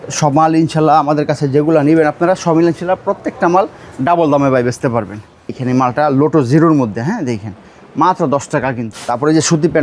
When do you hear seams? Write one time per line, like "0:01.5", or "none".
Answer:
0:05.6
0:08.9